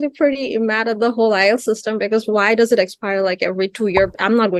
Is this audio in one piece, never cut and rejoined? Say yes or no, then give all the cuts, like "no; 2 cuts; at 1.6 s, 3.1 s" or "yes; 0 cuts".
yes; 0 cuts